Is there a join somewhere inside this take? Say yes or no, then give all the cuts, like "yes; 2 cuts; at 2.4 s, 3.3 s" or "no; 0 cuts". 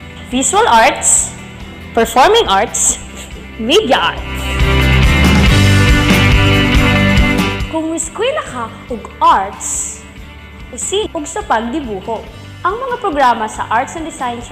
yes; 1 cut; at 11.1 s